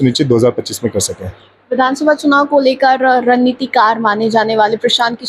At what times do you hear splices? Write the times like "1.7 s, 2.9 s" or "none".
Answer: none